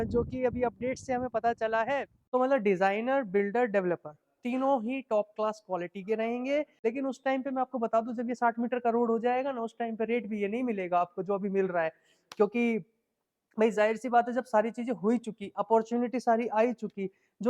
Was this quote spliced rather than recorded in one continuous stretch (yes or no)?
yes